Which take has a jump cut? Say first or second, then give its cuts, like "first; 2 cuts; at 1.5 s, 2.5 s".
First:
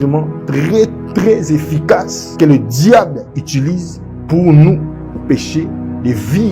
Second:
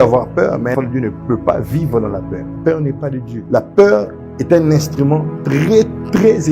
second; 3 cuts; at 0.7 s, 2.4 s, 3.3 s